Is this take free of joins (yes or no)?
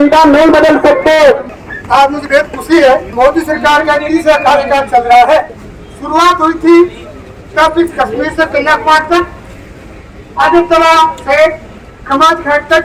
yes